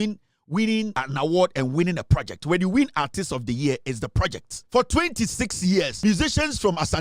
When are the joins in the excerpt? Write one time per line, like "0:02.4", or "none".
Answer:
0:01.0
0:04.6
0:05.9